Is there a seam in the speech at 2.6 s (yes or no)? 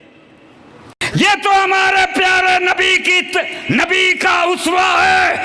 no